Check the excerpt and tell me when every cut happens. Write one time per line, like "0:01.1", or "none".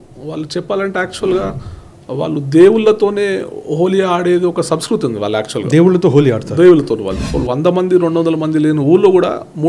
0:07.2